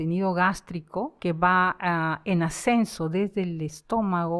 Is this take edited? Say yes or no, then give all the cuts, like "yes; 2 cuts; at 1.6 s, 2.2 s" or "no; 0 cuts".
yes; 1 cut; at 1.1 s